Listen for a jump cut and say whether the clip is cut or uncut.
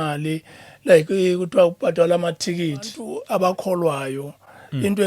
cut